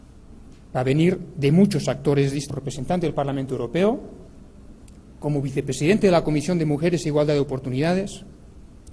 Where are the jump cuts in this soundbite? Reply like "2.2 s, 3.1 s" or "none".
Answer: none